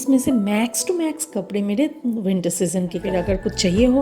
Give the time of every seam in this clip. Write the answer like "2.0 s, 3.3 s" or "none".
3.0 s